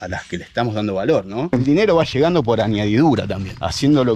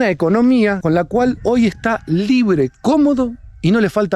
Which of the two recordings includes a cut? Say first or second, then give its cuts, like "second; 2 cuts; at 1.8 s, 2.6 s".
first; 1 cut; at 1.5 s